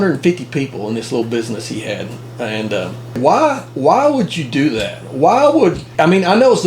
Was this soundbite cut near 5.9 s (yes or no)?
yes